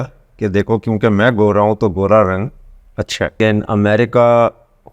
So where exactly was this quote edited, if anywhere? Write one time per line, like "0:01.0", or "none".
0:03.3